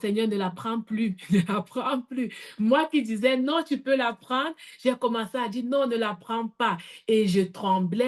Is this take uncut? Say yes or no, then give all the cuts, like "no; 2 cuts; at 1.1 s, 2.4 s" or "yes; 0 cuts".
yes; 0 cuts